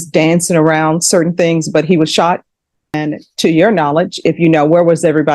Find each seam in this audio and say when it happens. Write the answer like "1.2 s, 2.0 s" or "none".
2.9 s